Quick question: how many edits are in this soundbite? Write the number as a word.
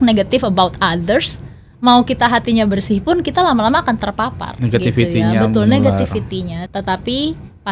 one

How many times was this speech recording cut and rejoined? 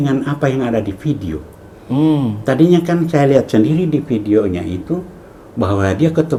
zero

